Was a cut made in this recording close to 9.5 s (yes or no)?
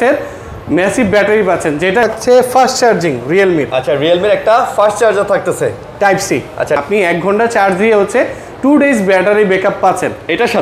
no